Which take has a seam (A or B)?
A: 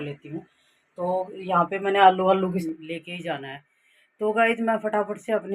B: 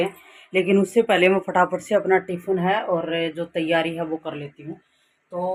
A